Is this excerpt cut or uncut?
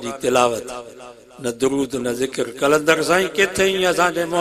uncut